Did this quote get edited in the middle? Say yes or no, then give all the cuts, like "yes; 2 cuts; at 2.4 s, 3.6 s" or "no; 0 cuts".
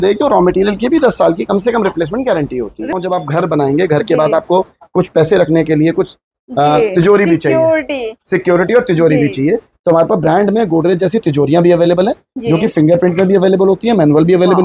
yes; 1 cut; at 3.0 s